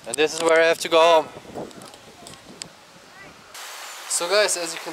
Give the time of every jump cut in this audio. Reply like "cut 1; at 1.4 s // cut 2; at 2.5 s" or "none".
cut 1; at 3.5 s